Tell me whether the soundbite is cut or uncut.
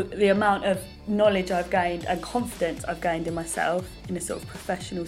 cut